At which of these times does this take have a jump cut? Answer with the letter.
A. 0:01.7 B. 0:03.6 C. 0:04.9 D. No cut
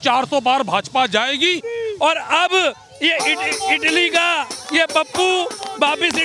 A